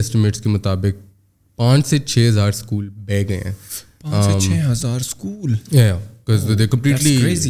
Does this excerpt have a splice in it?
no; 0 cuts

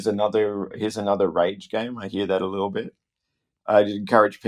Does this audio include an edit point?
no; 0 cuts

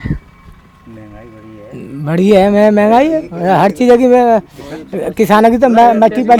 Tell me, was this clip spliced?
no; 0 cuts

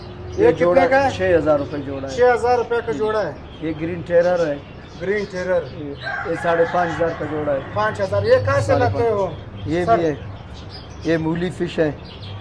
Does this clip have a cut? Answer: no; 0 cuts

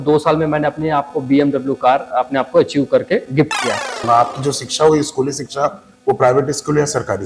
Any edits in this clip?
yes; 1 cut; at 3.9 s

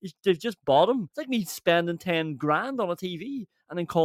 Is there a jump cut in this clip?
yes; 1 cut; at 1.1 s

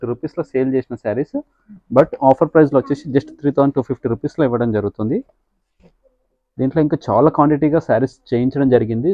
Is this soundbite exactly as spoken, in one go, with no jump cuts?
yes; 0 cuts

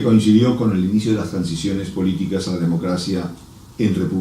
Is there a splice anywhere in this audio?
yes; 1 cut; at 2.8 s

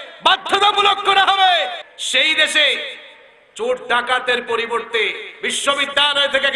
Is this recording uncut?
no; 1 cut; at 1.8 s

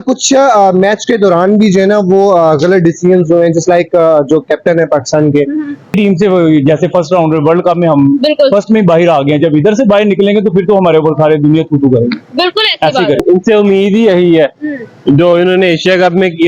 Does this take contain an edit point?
yes; 2 cuts; at 5.9 s, 13.2 s

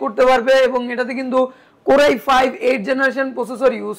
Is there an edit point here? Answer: no; 0 cuts

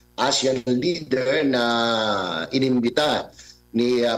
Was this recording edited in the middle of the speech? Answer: no; 0 cuts

